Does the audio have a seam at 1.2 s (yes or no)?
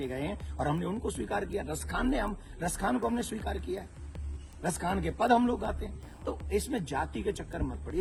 no